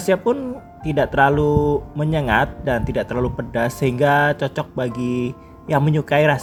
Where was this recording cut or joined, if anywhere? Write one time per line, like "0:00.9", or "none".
none